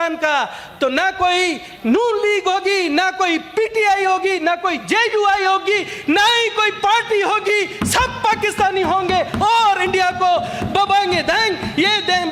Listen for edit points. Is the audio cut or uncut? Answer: uncut